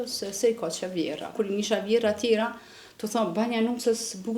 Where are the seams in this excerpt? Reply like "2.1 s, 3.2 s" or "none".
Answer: 1.3 s

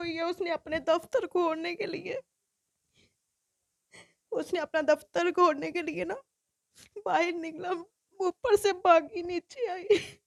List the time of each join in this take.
none

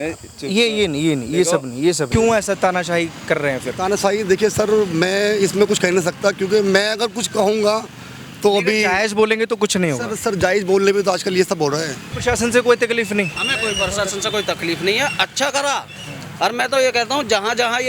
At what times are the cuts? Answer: 2.1 s, 12.1 s

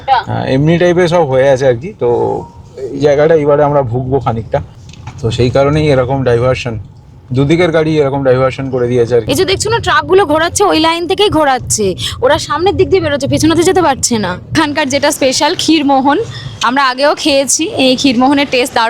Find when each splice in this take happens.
4.7 s, 9.2 s, 14.5 s

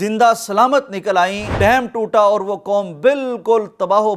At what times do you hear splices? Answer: 1.5 s

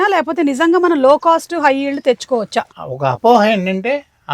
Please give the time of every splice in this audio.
2.8 s

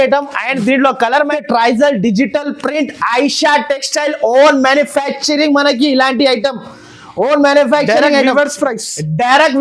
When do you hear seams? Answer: 1.3 s

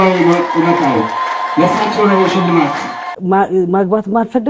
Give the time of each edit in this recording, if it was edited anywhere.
3.2 s

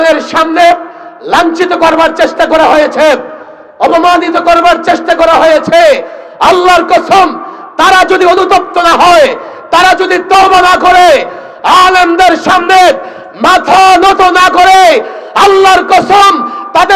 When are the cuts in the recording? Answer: none

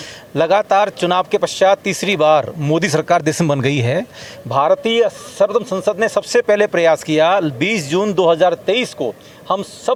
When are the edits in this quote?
none

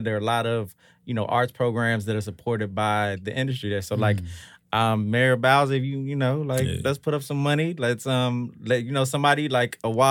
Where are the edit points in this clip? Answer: none

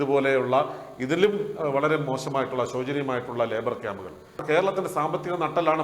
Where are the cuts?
4.4 s

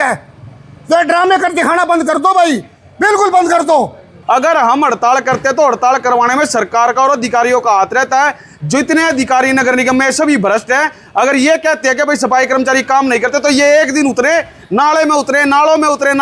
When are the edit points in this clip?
4.1 s, 8.5 s

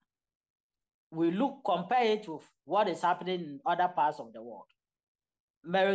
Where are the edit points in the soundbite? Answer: none

